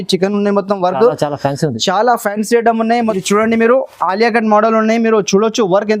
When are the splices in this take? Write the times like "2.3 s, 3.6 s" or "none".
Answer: 3.1 s